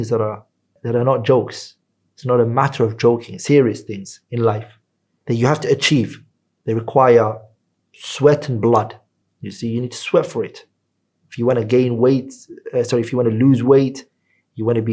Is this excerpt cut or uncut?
uncut